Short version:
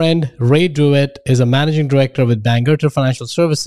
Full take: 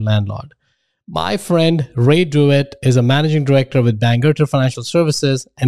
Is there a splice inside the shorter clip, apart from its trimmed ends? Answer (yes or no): no